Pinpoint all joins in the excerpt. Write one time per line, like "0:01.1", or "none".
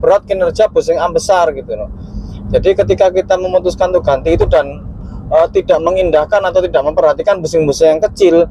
none